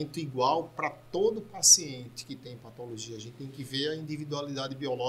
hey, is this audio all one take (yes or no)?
yes